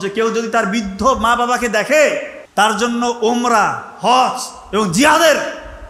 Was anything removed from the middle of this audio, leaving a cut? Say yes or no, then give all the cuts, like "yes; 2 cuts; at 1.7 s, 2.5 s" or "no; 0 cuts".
yes; 1 cut; at 2.3 s